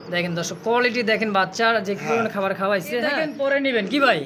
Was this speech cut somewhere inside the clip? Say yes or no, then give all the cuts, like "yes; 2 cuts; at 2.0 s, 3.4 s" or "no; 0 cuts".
yes; 1 cut; at 3.2 s